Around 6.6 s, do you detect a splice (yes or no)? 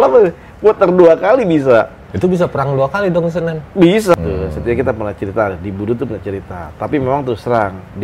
no